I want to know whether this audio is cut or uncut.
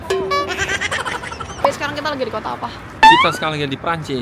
cut